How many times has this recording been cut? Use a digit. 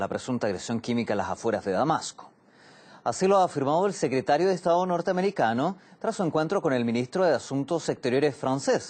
1